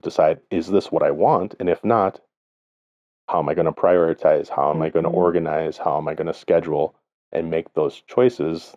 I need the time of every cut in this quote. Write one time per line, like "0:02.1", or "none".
none

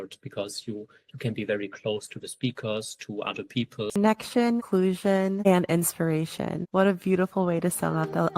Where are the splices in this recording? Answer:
0:04.0

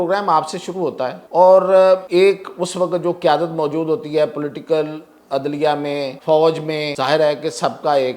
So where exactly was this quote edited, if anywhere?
0:01.2
0:02.1
0:06.2
0:06.9

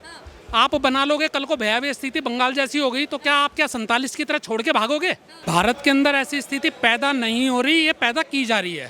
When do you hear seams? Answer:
0:05.3

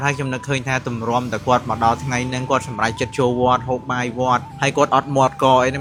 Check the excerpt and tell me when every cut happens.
none

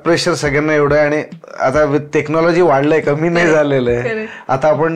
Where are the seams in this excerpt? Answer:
none

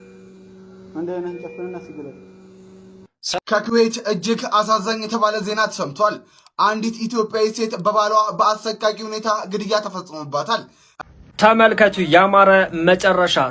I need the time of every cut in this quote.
0:03.4
0:10.8

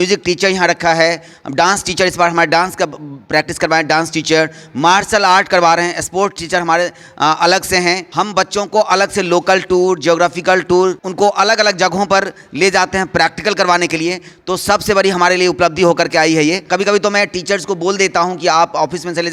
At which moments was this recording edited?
0:08.1
0:11.0
0:16.6

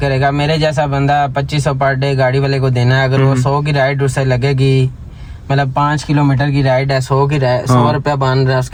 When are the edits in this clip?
none

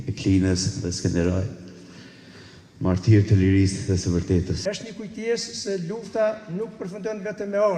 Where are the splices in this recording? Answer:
0:04.6

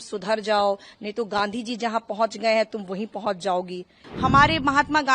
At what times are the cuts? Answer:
0:04.0

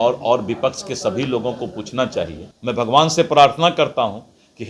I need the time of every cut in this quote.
0:02.5

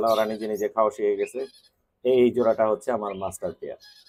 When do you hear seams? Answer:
none

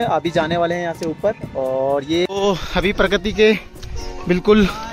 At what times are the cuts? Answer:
0:02.3

